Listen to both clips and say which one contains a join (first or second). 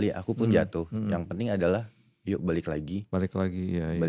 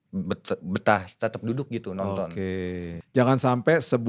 second